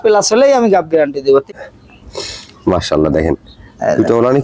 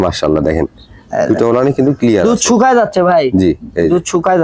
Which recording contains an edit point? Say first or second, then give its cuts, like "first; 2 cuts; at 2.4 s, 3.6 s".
first; 1 cut; at 1.4 s